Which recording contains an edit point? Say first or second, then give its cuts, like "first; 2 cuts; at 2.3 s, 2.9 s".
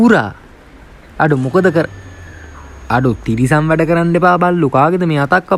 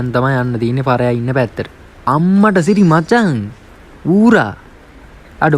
second; 1 cut; at 2.1 s